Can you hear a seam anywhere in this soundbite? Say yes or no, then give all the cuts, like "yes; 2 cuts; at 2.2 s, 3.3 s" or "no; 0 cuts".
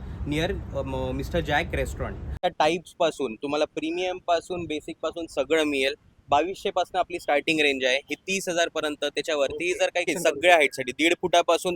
yes; 2 cuts; at 2.4 s, 10.1 s